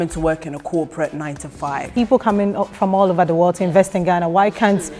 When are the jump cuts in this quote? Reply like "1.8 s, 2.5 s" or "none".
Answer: 1.9 s